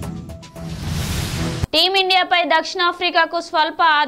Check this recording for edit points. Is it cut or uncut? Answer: uncut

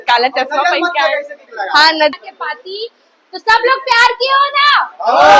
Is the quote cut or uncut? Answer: cut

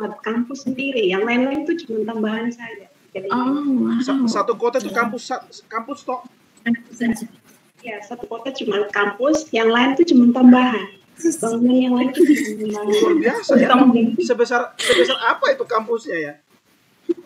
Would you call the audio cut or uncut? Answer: uncut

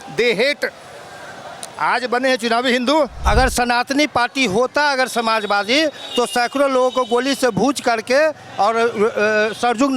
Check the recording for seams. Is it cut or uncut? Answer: cut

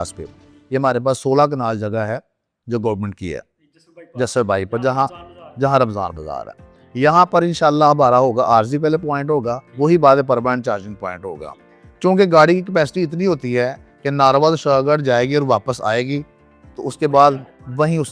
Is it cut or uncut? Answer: uncut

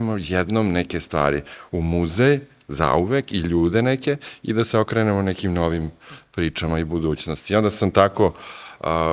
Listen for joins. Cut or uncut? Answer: uncut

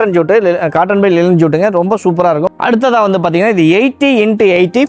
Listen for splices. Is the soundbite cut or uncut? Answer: cut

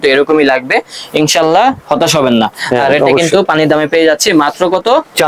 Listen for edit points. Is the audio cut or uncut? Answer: uncut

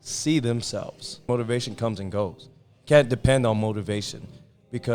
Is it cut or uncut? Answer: cut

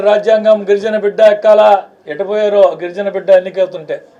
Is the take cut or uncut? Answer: uncut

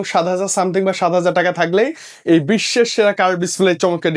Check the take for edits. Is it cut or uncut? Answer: uncut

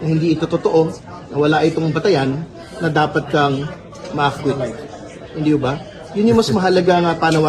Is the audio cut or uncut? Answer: uncut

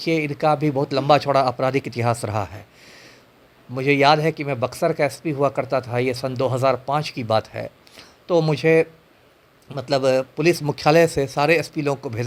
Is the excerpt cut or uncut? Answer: uncut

